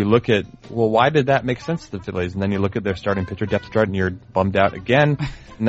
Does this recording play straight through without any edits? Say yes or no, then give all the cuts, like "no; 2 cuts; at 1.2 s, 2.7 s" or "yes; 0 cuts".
yes; 0 cuts